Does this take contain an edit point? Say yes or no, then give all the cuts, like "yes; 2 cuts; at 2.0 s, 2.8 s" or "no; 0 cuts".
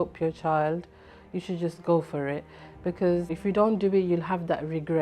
yes; 1 cut; at 3.4 s